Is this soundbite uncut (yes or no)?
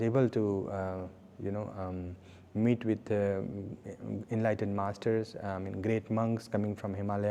yes